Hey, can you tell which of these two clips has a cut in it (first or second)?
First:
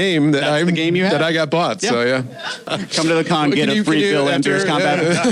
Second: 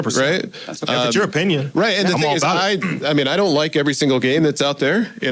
first